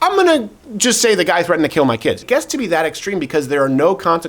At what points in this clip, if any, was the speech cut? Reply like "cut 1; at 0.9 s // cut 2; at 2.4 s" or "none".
cut 1; at 2.2 s

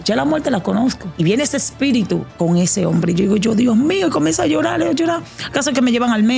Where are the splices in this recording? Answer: cut 1; at 1.1 s // cut 2; at 2.3 s

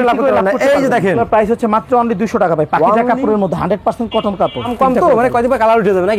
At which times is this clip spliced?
cut 1; at 1.2 s // cut 2; at 4.7 s

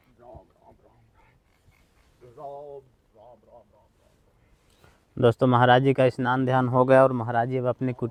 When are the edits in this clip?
none

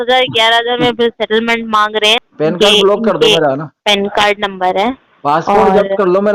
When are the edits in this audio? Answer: cut 1; at 2.2 s

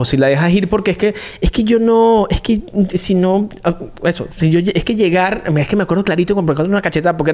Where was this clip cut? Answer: none

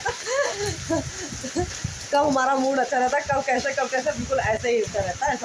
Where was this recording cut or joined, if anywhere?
none

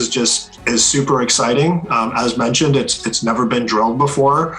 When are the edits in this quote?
none

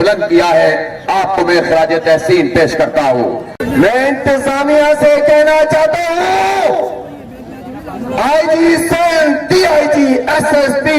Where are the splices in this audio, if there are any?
cut 1; at 3.5 s

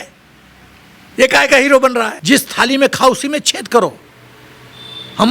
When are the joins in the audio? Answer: cut 1; at 2.1 s

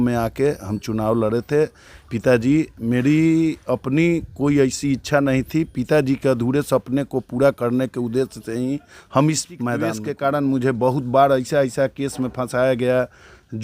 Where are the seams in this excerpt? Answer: cut 1; at 10.0 s

